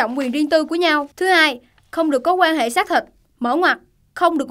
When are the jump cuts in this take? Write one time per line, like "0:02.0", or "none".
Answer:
0:01.1